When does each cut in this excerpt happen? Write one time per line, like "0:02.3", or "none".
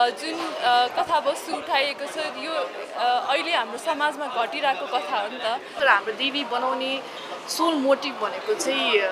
0:05.7